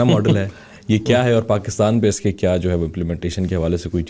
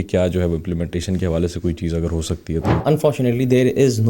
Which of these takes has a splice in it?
second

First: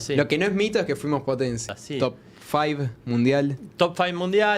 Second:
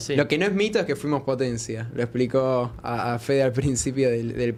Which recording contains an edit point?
first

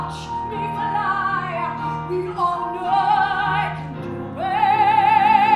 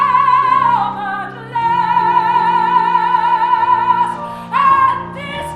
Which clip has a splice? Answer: second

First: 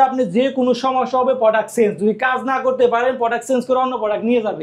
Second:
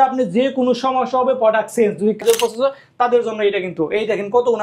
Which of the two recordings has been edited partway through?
second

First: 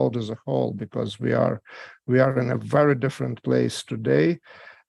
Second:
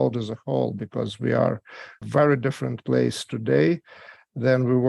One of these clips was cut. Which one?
second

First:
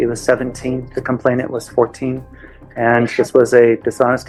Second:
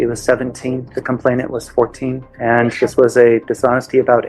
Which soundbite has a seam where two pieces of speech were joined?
second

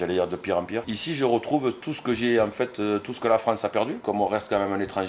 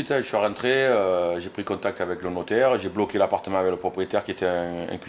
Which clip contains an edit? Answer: first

